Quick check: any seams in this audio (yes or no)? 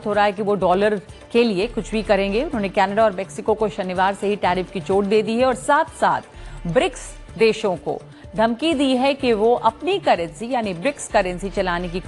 no